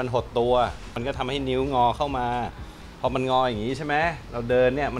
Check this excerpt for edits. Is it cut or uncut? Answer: cut